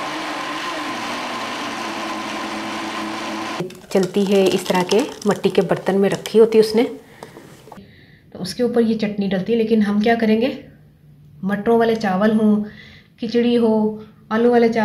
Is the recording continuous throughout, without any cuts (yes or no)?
no